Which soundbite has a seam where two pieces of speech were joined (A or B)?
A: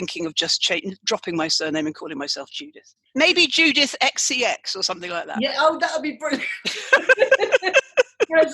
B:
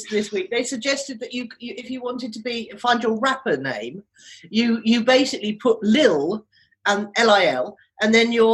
A